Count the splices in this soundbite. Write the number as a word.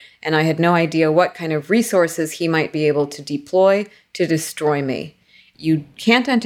one